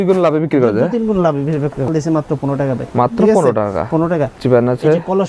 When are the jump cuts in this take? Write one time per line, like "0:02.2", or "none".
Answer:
0:01.9
0:04.4

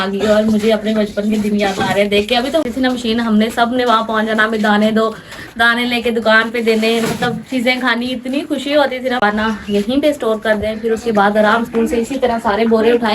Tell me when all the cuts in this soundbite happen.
0:02.6
0:09.2

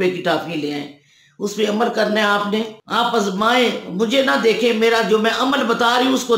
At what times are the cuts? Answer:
0:02.8

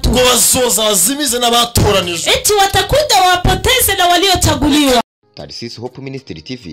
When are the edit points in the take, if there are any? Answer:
0:05.0

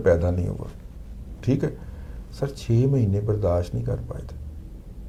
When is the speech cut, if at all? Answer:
none

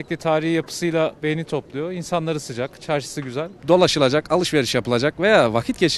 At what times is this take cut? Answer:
0:03.5

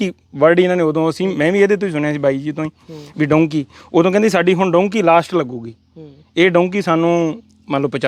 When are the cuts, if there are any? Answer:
none

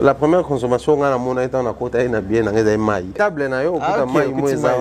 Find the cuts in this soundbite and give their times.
0:03.2

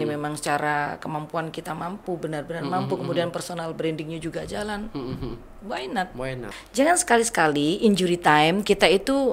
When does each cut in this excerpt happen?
0:06.5

